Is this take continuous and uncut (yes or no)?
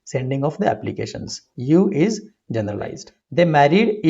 no